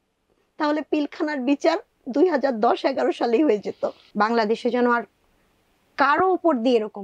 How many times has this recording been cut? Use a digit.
1